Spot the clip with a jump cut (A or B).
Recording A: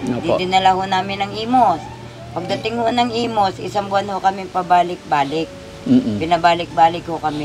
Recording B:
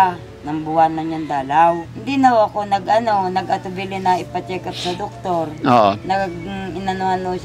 B